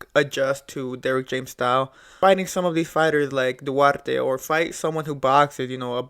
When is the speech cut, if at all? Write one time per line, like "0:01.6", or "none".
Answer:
0:02.2

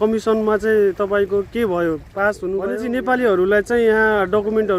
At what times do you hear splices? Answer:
0:02.7

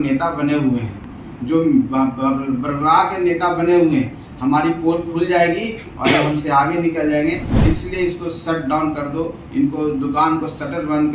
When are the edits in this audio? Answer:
none

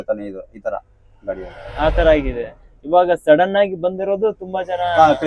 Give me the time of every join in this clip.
none

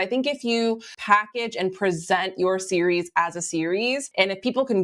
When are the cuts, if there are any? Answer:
0:00.9
0:04.1

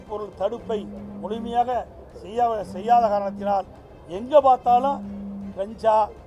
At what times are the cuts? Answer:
none

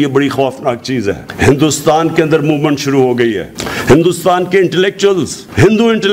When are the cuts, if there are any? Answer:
0:01.2

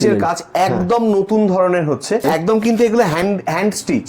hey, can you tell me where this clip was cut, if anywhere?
0:02.2

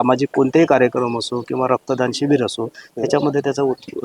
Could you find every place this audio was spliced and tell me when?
none

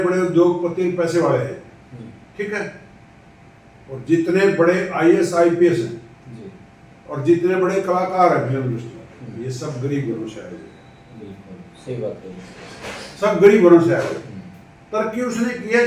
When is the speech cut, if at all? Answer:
none

